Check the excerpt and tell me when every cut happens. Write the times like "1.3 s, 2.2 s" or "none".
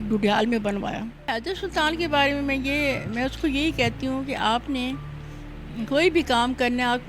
1.3 s